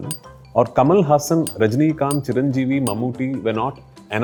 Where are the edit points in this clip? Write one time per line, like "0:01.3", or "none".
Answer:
none